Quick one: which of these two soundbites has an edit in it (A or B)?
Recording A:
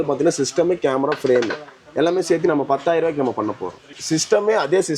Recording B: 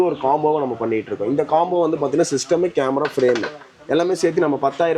A